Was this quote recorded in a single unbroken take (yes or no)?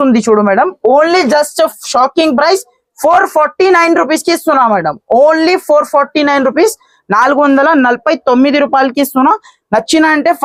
yes